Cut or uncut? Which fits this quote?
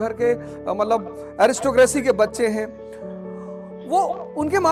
uncut